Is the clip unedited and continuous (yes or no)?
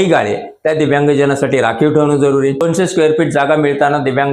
no